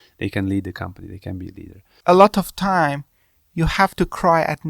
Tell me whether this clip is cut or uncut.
cut